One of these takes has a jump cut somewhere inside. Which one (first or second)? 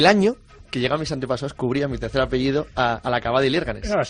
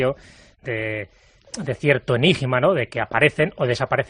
first